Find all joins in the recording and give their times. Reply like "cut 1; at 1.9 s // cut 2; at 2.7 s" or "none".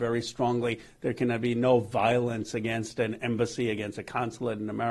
none